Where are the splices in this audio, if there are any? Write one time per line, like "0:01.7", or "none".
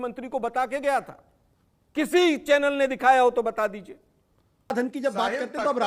0:04.7